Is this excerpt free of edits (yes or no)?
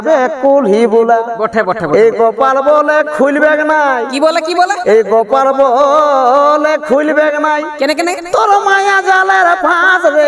yes